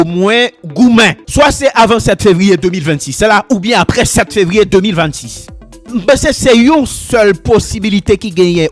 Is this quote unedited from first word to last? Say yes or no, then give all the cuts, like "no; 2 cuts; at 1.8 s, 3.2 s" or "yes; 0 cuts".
no; 2 cuts; at 1.2 s, 5.9 s